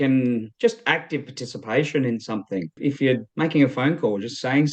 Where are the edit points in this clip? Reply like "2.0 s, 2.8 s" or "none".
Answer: 2.7 s